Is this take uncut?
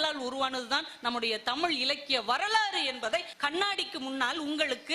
no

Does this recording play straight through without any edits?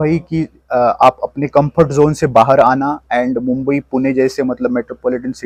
yes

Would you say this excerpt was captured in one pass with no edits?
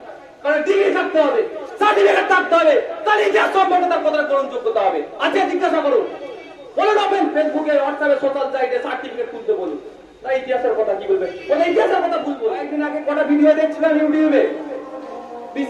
no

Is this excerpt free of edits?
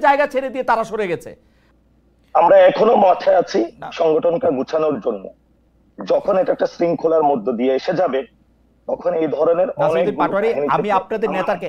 no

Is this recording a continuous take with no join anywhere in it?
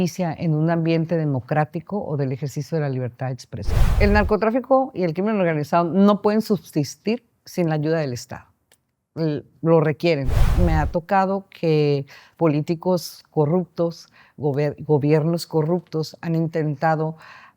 no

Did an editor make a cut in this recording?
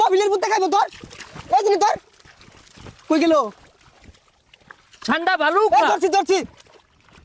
no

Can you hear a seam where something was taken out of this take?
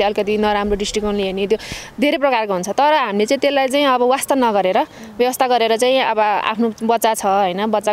no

